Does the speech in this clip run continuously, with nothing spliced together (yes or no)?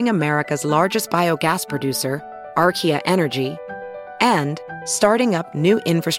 yes